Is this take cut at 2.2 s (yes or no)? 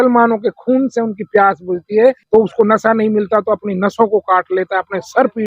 yes